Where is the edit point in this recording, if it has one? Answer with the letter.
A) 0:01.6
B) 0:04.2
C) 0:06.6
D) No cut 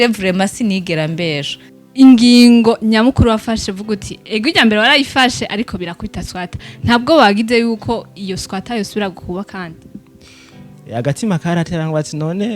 A